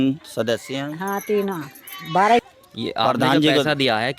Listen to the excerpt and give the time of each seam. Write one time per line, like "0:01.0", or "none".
0:02.4